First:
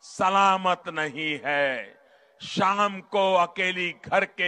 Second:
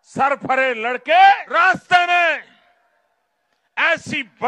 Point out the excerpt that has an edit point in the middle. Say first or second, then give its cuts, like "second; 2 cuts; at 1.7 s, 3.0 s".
second; 1 cut; at 1.4 s